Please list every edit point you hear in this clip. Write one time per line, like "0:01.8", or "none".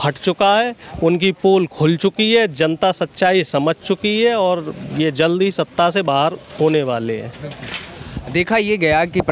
none